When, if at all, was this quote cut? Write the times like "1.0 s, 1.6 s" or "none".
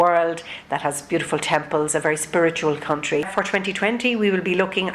3.3 s